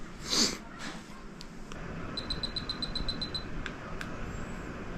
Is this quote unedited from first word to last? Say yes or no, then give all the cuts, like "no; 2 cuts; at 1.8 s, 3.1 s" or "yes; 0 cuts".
no; 1 cut; at 1.8 s